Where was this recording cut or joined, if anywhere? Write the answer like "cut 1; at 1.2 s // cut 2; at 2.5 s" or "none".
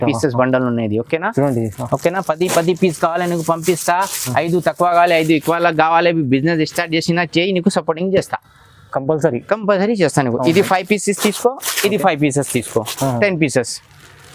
none